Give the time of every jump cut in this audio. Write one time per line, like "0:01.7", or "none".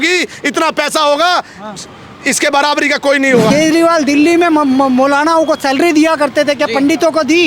0:03.5